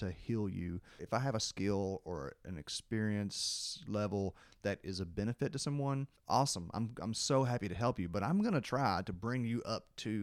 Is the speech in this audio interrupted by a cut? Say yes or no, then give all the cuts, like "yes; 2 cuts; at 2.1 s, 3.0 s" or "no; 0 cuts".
yes; 2 cuts; at 0.9 s, 6.1 s